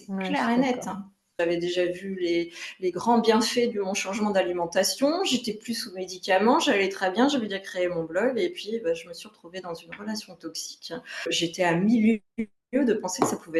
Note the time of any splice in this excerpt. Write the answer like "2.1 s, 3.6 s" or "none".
1.4 s, 11.3 s